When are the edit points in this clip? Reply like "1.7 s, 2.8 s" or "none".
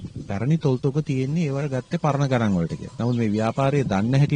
2.8 s